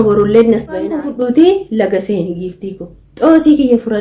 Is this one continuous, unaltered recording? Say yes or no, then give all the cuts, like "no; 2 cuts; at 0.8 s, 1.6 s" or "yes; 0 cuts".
no; 1 cut; at 1.0 s